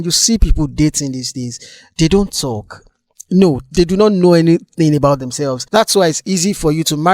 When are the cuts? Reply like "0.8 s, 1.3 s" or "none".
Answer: 5.6 s